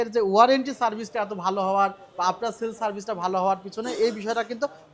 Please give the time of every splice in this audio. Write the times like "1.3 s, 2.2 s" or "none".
none